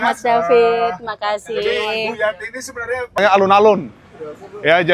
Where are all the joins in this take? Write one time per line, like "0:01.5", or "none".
0:03.2

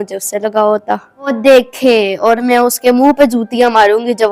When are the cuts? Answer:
0:01.3

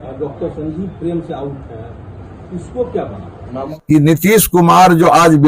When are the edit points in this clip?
0:03.7

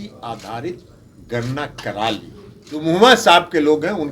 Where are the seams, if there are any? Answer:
0:02.7

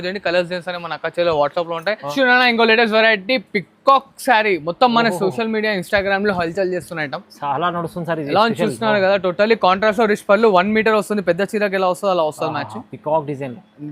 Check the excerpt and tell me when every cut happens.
0:02.0

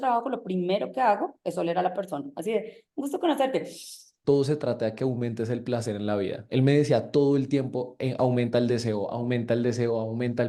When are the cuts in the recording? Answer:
0:04.1

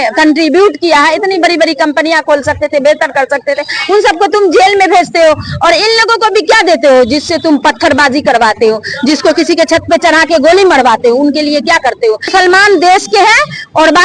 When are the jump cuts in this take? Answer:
0:12.3

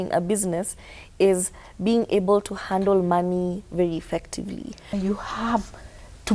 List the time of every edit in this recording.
0:04.9

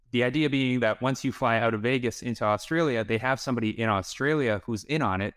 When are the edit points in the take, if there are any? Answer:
none

